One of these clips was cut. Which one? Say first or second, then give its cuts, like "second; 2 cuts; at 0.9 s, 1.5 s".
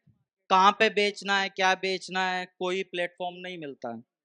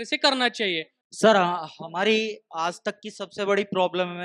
second; 1 cut; at 0.9 s